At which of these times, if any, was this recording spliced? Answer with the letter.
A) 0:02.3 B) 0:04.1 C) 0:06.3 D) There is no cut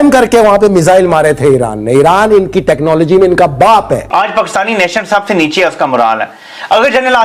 B